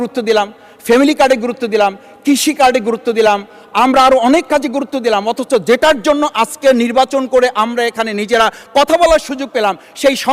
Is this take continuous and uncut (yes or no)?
yes